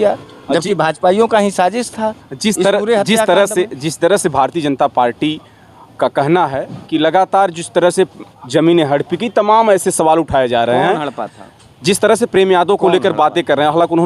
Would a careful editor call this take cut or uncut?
uncut